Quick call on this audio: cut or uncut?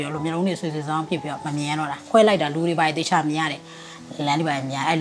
cut